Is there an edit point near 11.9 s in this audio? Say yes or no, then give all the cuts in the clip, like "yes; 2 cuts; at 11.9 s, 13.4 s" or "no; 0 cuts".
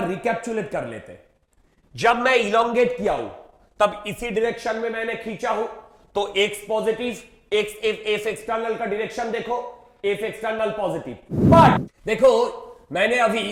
yes; 1 cut; at 11.9 s